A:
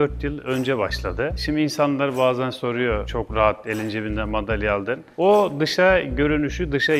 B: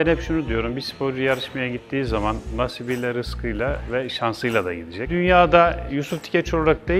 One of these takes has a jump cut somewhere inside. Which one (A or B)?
B